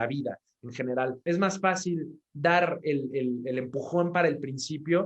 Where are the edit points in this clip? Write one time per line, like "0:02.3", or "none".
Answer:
0:01.2